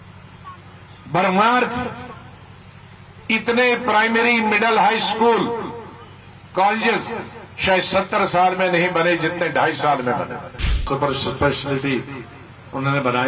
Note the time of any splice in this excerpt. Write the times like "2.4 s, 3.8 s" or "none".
10.9 s